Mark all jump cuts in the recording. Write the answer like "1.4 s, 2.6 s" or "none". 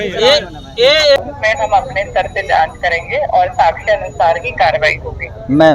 1.2 s